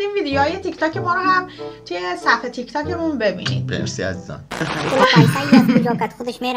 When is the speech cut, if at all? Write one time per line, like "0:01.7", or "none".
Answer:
0:04.7

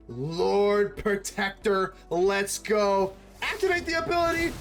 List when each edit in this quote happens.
none

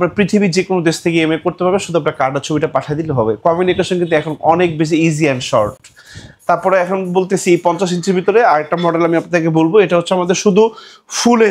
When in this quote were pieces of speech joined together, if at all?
none

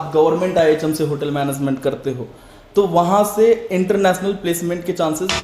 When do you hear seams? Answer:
none

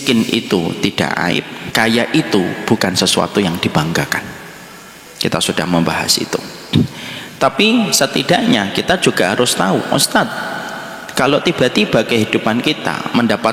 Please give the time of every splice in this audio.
0:01.6

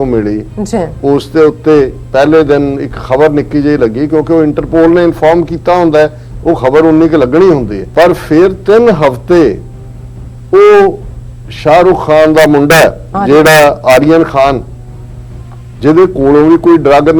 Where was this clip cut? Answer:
0:07.8

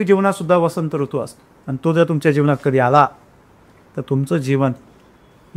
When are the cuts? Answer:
none

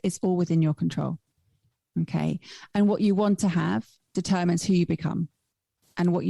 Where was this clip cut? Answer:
none

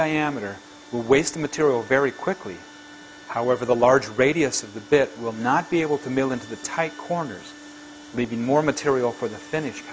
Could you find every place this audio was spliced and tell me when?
0:06.7

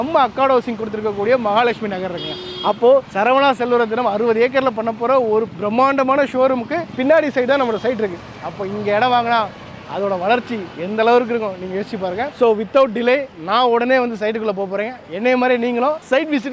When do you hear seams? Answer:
none

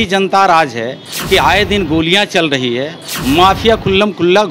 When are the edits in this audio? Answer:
none

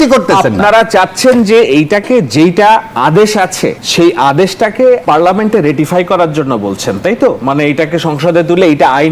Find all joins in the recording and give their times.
0:03.8
0:05.0

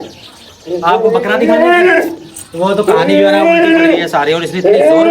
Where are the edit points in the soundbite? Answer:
none

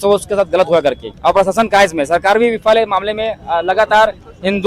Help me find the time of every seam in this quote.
0:01.1

